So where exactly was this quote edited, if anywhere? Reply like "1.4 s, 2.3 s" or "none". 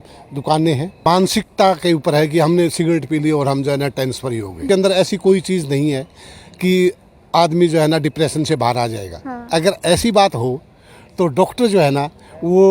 1.0 s, 4.6 s